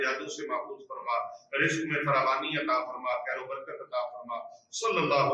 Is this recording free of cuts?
yes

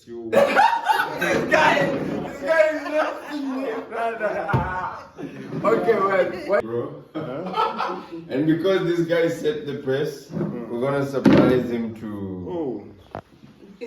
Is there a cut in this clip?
yes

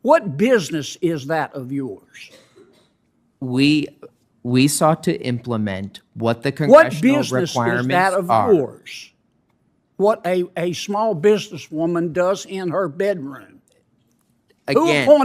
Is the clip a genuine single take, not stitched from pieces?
yes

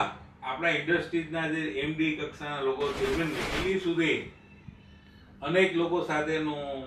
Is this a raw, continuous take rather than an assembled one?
no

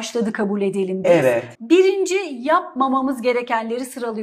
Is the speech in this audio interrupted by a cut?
yes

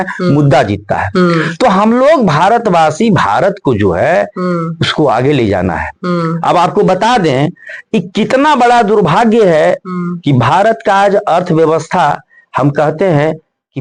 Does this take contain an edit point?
no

